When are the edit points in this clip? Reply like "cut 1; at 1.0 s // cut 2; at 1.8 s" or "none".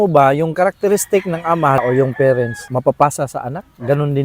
cut 1; at 1.8 s // cut 2; at 2.6 s